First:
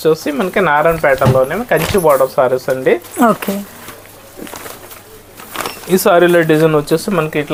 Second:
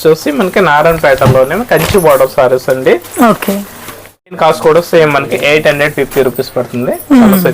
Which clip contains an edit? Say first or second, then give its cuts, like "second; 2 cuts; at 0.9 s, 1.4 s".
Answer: second; 1 cut; at 4.4 s